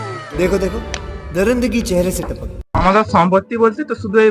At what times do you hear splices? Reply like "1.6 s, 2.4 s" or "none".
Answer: 2.6 s